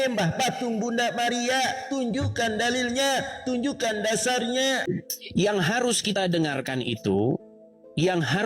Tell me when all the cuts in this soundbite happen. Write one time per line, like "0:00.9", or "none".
0:04.8

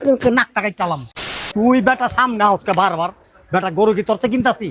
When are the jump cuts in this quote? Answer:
0:01.2

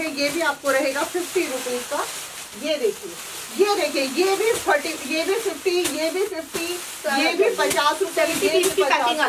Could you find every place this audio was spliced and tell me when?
none

